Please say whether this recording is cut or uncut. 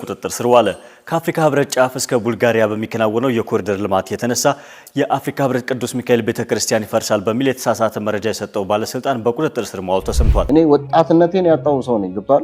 cut